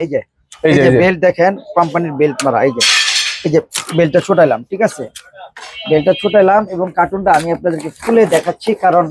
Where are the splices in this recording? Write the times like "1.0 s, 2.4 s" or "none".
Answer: none